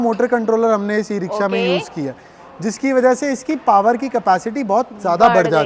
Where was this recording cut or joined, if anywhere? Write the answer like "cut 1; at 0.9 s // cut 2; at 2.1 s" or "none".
none